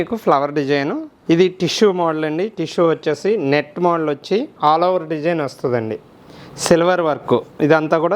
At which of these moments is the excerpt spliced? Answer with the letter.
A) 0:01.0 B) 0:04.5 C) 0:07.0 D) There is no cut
A